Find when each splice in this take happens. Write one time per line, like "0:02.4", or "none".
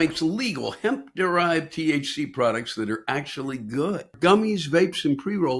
0:04.1